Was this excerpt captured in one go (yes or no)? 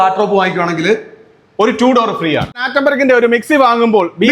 no